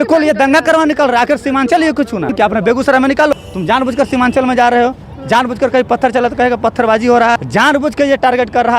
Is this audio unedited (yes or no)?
no